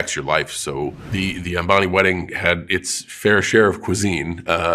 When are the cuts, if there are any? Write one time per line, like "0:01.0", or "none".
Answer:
0:01.0